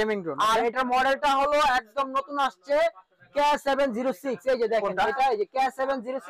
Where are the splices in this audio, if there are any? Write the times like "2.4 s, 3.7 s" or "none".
none